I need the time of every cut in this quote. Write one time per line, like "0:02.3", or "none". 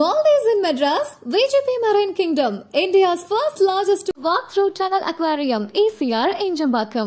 none